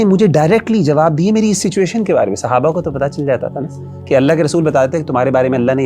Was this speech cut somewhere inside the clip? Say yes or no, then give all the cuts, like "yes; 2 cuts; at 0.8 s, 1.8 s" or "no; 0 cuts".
no; 0 cuts